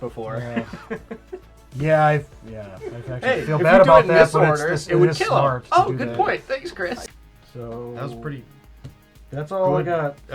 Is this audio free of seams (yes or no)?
no